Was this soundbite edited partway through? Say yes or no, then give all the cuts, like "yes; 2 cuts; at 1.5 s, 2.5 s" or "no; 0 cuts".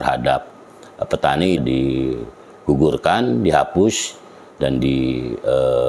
yes; 1 cut; at 1.6 s